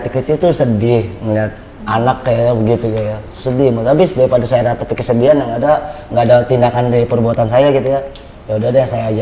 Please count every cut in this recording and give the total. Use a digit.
0